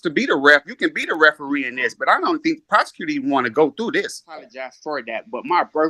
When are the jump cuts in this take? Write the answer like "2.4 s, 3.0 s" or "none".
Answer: 4.7 s

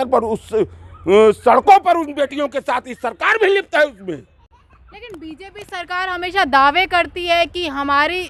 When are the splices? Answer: none

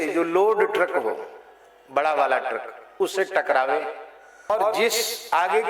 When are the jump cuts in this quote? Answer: 4.5 s

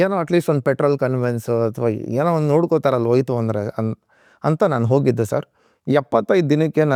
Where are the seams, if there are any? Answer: none

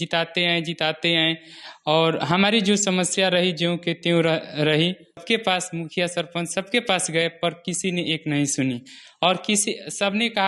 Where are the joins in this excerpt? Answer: 5.2 s

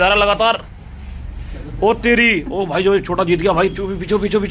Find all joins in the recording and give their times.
none

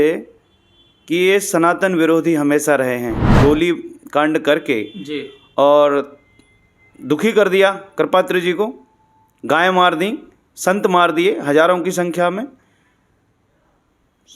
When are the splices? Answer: 3.4 s

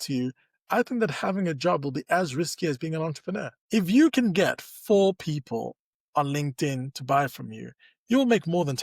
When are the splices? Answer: 3.5 s

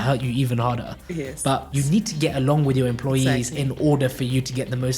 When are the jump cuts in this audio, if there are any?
1.7 s

